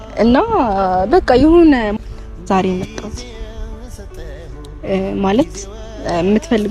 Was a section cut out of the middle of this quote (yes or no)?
yes